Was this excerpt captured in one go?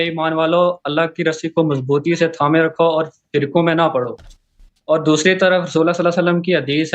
yes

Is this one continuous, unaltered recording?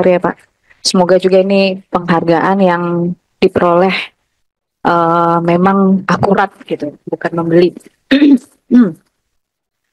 yes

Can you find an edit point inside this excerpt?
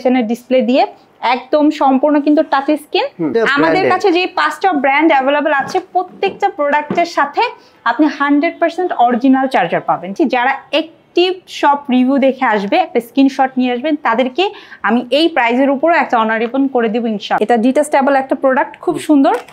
yes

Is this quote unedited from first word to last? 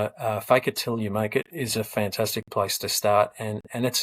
yes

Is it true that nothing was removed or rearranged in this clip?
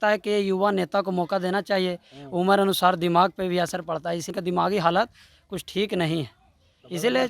no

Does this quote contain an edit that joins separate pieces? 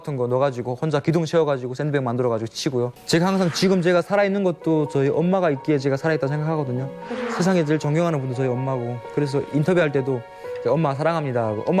yes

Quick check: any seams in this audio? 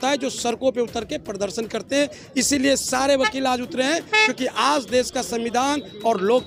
no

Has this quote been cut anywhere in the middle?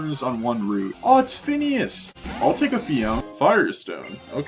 yes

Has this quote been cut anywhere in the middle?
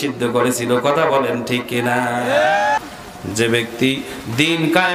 yes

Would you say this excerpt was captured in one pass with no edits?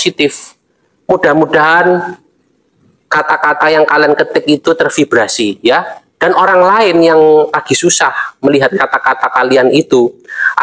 yes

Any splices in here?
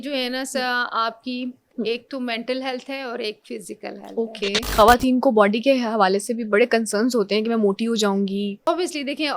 yes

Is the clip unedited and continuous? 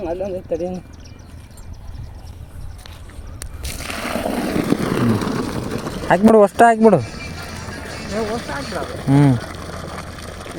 yes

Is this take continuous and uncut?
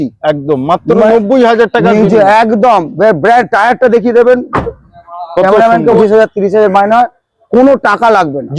no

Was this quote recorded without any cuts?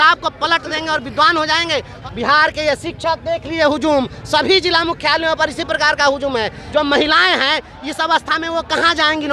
no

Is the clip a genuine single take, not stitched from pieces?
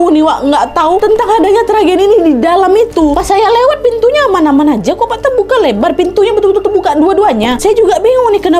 no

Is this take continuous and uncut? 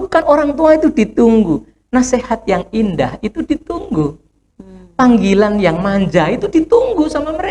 yes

